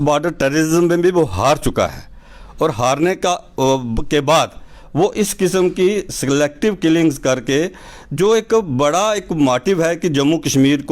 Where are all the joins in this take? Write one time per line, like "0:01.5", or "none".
none